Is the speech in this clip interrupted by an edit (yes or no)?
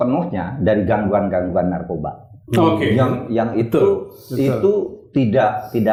no